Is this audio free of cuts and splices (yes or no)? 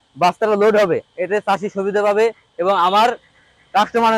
yes